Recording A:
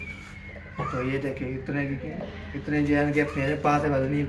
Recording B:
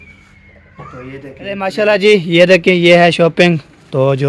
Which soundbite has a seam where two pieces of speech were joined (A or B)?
B